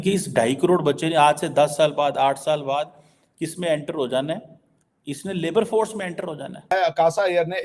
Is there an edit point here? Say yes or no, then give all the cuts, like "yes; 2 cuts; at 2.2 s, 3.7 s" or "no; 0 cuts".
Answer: yes; 1 cut; at 6.7 s